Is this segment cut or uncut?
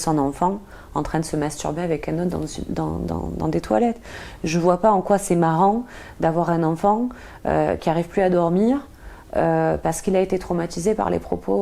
uncut